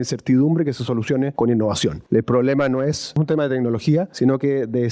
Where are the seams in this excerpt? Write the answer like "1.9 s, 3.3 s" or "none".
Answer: 1.3 s, 2.0 s, 3.2 s, 4.1 s